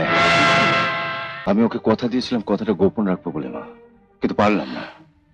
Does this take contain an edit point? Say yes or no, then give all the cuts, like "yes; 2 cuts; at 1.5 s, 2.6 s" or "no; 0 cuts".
yes; 1 cut; at 1.3 s